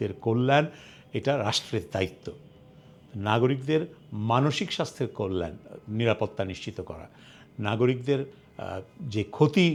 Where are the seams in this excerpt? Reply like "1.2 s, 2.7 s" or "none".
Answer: none